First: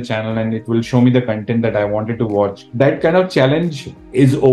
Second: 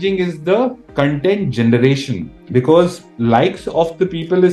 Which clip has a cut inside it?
first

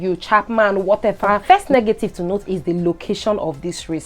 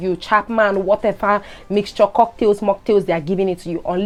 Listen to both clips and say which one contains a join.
first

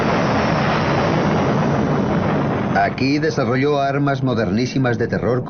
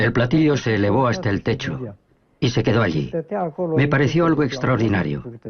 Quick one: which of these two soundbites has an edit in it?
first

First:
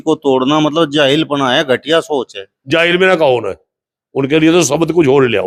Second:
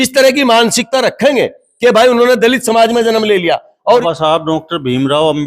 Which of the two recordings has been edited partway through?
second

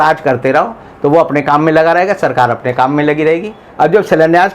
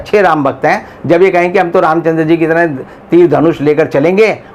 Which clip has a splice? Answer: first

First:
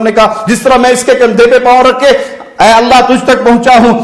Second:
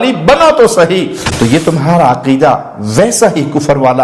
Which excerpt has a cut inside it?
second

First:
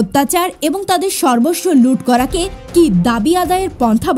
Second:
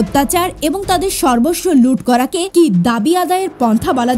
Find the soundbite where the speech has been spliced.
second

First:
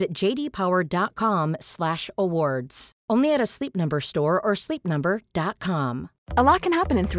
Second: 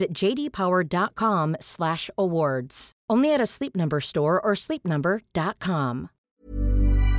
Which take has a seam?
second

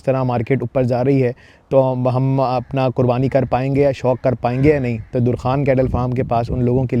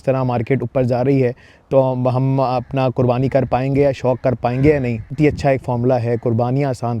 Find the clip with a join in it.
second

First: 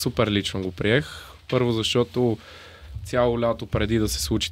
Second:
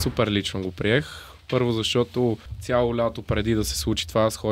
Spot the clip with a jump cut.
second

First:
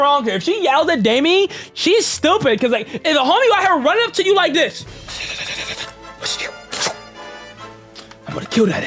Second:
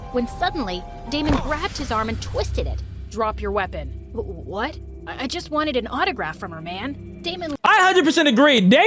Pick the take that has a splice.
second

